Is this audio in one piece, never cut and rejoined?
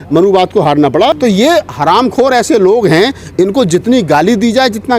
no; 1 cut; at 1.1 s

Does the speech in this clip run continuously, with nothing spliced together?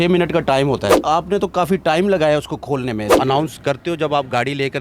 no; 2 cuts; at 0.9 s, 3.1 s

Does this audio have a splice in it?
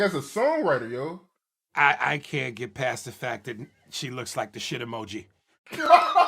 no; 0 cuts

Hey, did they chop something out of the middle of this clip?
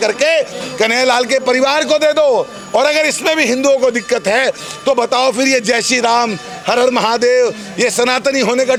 no; 0 cuts

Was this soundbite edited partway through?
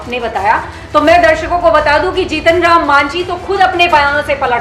no; 0 cuts

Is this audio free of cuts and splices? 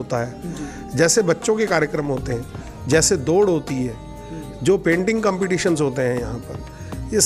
yes; 0 cuts

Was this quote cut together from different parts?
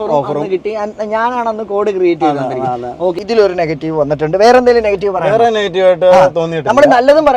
yes; 1 cut; at 3.2 s

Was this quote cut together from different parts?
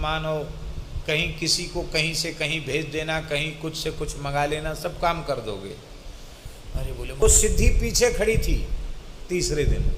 yes; 1 cut; at 7.2 s

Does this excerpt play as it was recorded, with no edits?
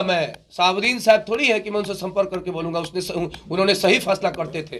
yes; 0 cuts

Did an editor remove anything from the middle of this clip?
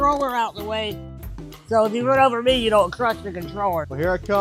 no; 0 cuts

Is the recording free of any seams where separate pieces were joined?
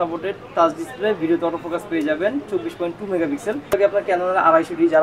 no; 1 cut; at 3.7 s

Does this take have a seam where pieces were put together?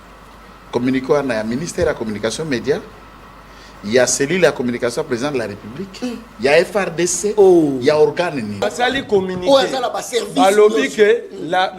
yes; 1 cut; at 8.7 s

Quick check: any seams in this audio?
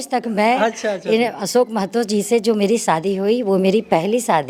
no; 0 cuts

